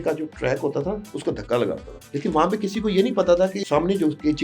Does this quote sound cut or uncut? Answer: cut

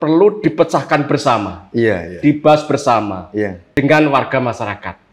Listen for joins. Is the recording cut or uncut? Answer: cut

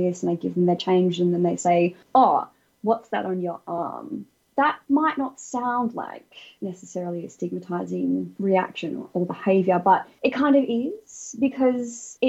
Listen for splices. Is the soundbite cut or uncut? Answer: uncut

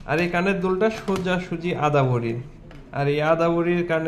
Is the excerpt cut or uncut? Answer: uncut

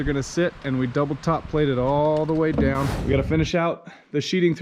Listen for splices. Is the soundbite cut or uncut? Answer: cut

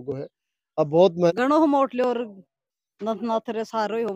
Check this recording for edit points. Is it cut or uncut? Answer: cut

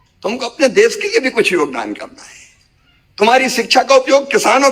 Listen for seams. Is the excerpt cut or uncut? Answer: uncut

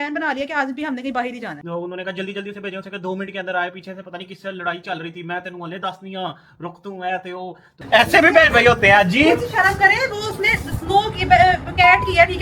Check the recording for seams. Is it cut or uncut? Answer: cut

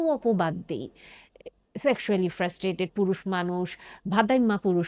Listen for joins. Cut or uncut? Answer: uncut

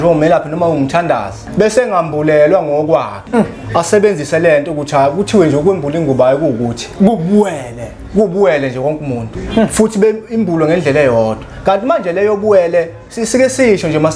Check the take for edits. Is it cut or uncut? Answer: cut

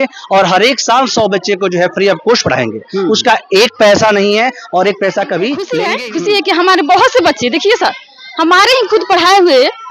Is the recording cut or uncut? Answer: cut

